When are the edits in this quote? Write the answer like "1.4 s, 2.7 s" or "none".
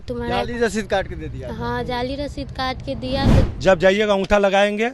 3.5 s